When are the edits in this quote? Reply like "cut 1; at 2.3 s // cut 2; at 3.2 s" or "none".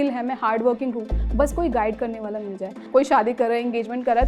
cut 1; at 2.8 s